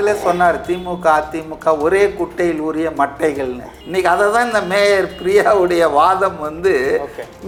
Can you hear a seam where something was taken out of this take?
no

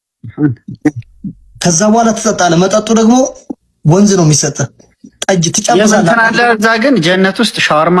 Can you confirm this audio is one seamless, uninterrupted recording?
yes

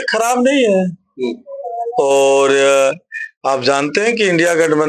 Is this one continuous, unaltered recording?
yes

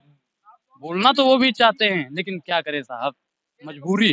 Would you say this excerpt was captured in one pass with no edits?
yes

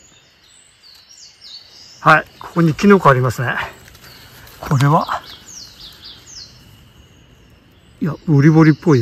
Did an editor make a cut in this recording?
no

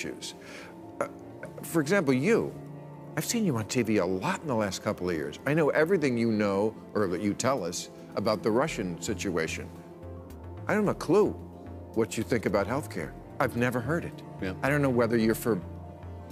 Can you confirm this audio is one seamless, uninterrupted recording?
yes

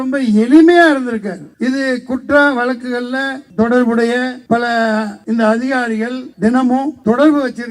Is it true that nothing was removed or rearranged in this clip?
no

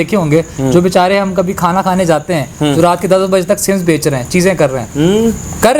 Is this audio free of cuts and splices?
yes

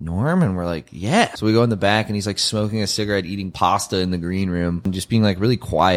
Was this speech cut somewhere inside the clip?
yes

